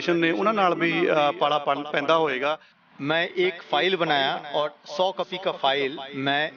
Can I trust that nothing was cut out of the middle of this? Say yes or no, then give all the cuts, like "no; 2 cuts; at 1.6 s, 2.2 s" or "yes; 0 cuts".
no; 1 cut; at 2.7 s